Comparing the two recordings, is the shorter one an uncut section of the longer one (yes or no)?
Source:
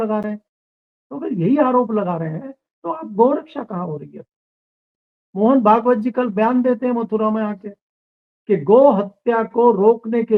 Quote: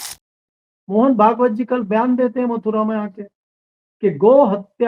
yes